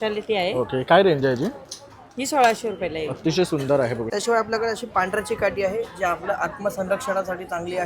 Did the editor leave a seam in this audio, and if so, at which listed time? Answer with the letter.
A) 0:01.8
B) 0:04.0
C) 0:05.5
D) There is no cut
B